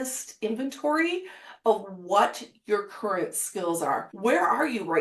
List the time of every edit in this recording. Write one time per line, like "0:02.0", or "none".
0:04.1